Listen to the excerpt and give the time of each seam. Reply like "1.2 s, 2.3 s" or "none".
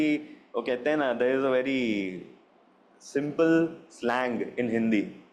none